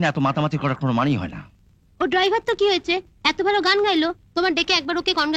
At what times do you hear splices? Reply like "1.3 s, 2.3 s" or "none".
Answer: none